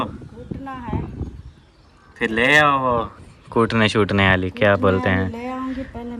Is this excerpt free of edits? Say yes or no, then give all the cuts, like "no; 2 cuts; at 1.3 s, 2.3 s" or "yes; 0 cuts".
yes; 0 cuts